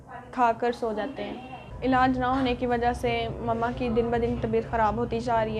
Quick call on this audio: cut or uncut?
cut